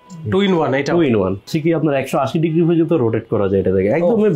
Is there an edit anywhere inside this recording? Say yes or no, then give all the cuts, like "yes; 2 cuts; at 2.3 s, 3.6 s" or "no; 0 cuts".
yes; 1 cut; at 1.5 s